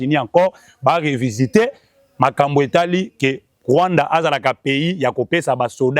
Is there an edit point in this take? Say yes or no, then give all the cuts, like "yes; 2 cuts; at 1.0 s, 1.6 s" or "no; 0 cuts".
no; 0 cuts